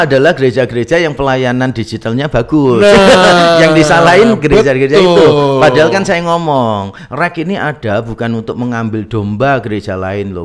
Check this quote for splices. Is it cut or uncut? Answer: uncut